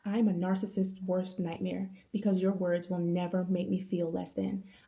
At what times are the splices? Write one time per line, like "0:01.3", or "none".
none